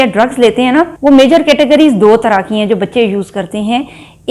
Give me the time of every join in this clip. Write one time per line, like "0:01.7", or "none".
none